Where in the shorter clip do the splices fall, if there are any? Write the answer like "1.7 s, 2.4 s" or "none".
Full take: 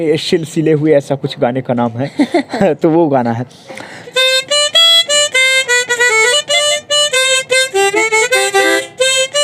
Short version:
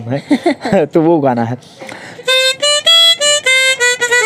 none